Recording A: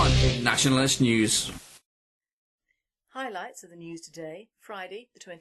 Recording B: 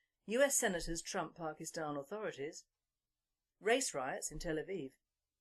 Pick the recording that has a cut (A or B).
A